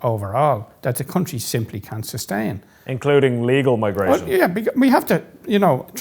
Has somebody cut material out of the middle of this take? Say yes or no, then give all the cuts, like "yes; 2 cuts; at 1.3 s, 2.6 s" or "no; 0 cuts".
no; 0 cuts